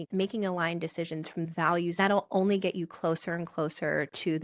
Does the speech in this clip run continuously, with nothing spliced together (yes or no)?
no